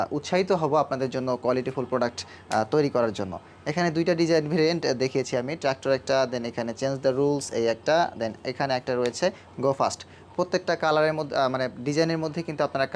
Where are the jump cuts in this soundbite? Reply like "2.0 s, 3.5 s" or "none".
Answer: none